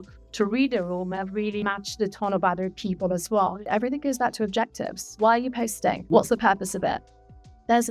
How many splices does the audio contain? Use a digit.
4